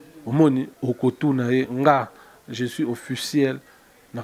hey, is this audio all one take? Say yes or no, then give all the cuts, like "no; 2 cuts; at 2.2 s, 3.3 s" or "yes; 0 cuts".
yes; 0 cuts